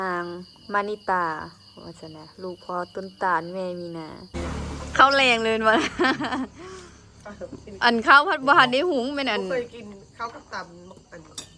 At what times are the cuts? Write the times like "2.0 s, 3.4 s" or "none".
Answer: 4.3 s